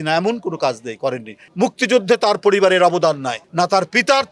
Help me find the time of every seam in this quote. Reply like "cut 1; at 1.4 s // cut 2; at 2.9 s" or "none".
cut 1; at 1.4 s // cut 2; at 3.4 s